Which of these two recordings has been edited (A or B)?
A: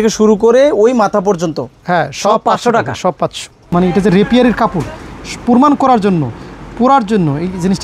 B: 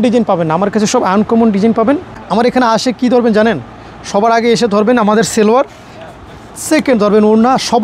A